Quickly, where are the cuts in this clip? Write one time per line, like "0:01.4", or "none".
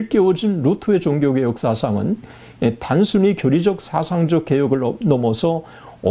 none